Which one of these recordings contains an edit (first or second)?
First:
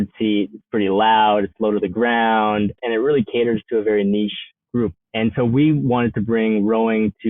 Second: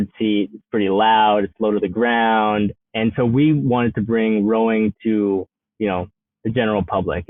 first